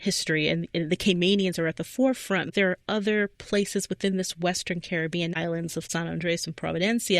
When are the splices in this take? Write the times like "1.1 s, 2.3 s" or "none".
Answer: 2.5 s, 5.4 s

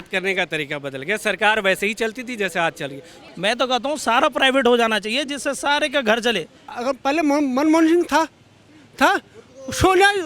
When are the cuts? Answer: 3.2 s, 6.7 s

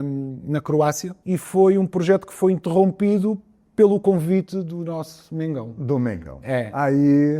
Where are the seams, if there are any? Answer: 1.1 s

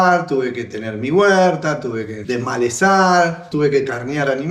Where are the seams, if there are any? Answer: 2.1 s, 3.4 s

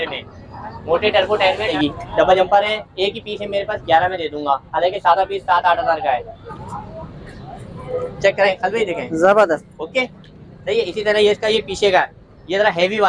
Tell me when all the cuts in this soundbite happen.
1.7 s, 6.4 s

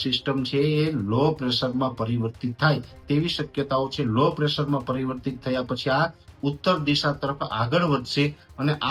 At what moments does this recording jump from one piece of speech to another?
none

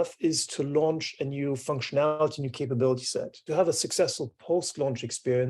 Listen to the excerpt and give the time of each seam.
3.4 s

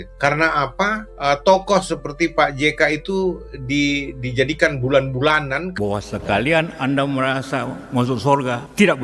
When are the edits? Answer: 5.7 s

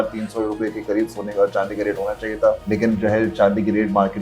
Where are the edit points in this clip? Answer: 2.6 s

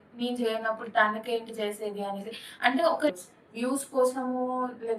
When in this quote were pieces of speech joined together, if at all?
3.1 s

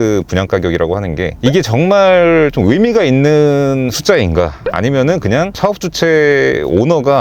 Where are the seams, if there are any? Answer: none

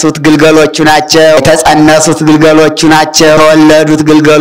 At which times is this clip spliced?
1.4 s, 3.4 s

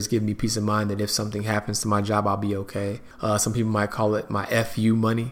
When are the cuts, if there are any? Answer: 3.1 s

